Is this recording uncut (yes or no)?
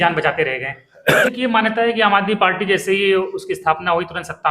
no